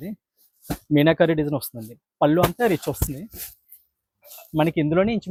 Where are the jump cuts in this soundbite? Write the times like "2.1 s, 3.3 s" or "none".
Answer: none